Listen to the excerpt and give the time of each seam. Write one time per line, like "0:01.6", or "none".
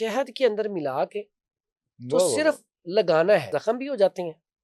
0:03.5